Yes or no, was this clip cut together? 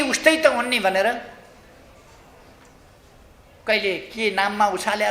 no